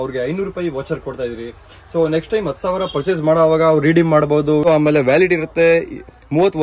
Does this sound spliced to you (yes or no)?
yes